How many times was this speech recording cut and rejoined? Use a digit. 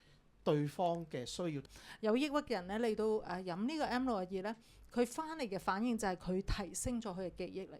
1